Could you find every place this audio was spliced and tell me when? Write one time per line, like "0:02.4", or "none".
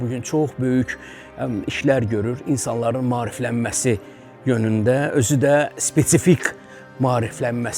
none